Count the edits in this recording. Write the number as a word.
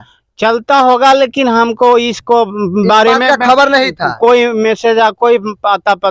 zero